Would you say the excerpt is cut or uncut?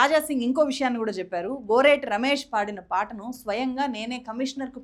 uncut